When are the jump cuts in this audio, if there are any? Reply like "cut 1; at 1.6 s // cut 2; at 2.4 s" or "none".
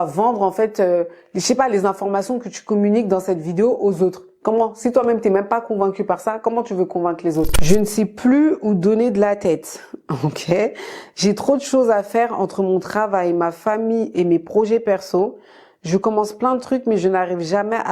cut 1; at 7.6 s